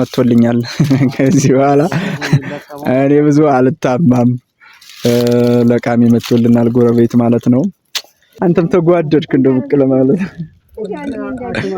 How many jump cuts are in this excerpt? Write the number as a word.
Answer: zero